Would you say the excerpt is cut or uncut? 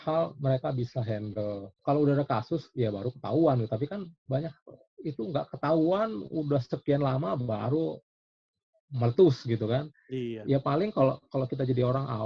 uncut